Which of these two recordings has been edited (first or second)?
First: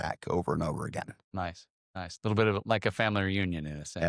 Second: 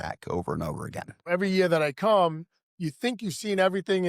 second